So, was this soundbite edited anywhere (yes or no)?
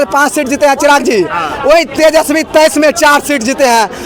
no